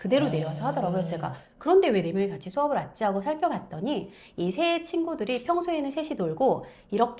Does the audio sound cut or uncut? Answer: uncut